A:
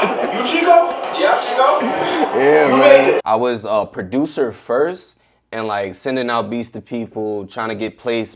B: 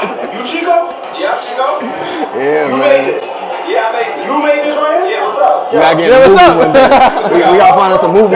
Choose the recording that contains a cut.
A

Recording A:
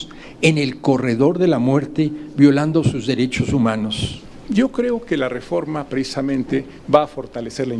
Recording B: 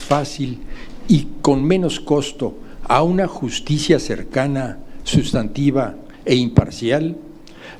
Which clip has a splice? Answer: A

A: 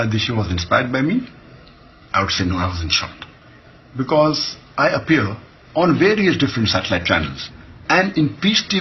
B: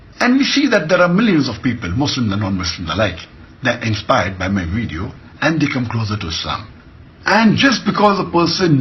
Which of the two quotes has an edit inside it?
A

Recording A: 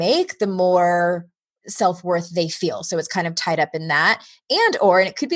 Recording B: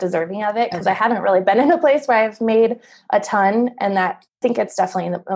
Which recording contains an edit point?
B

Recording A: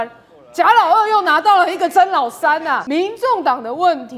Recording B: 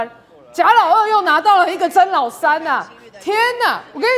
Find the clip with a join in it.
A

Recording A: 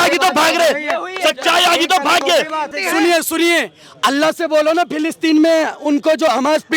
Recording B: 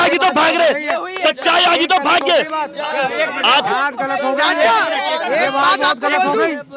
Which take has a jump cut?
A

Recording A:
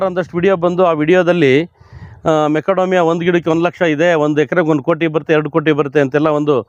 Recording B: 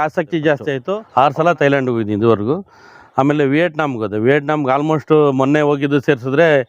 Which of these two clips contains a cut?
B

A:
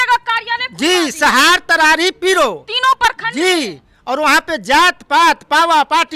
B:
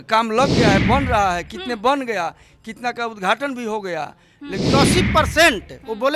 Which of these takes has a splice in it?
B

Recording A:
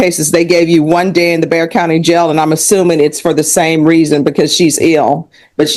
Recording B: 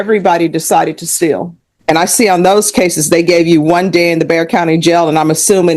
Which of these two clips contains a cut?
B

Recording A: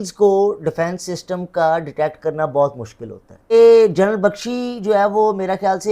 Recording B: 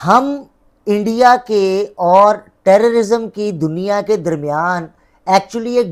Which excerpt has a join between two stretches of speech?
A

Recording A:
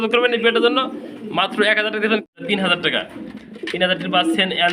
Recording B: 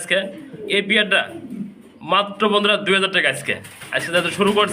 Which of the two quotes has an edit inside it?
A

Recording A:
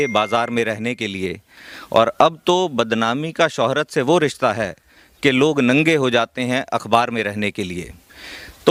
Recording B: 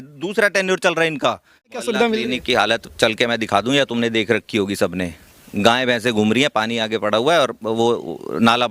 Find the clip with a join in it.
B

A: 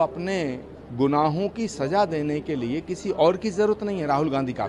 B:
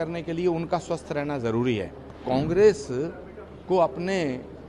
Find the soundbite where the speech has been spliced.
B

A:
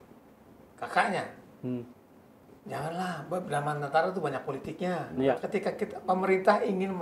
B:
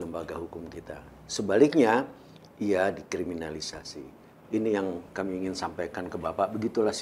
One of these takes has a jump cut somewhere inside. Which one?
A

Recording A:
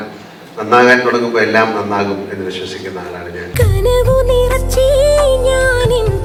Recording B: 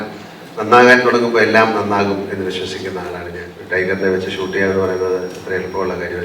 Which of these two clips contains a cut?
B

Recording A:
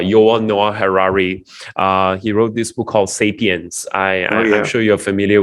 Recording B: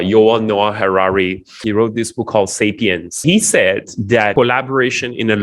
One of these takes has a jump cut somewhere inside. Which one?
B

